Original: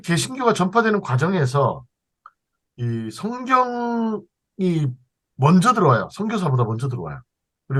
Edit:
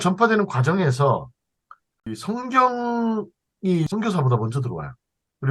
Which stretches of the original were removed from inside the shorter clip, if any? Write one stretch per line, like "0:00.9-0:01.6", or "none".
0:02.7-0:03.1
0:04.8-0:06.2